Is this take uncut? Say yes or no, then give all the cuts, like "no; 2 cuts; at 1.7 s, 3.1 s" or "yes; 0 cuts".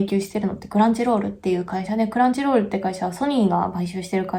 yes; 0 cuts